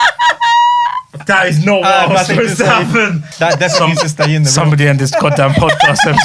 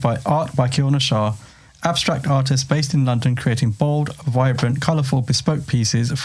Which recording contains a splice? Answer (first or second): first